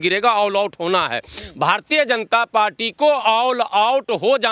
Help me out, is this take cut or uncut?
uncut